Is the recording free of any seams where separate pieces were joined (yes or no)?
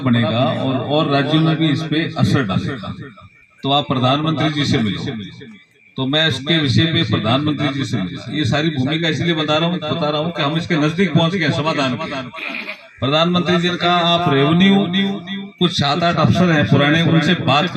yes